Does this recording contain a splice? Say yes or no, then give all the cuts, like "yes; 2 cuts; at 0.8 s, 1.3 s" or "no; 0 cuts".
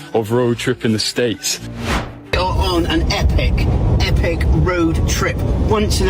yes; 1 cut; at 1.9 s